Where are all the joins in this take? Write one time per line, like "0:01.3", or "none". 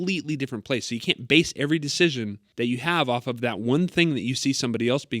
0:02.4